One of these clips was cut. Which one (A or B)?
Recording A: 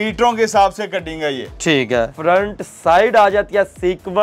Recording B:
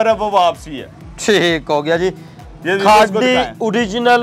A